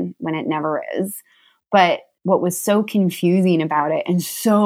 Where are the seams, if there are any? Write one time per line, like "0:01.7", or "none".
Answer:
0:02.1